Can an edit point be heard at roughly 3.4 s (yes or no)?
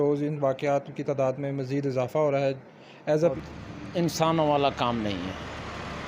yes